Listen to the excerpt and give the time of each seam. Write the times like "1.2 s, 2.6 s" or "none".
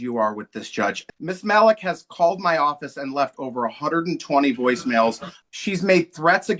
1.0 s, 5.3 s